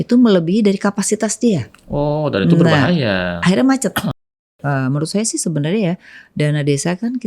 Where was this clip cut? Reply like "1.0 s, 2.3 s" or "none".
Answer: 4.3 s